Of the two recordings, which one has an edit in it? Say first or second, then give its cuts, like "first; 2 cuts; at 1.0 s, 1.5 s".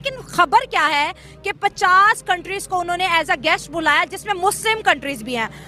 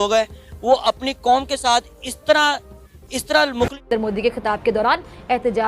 second; 1 cut; at 3.9 s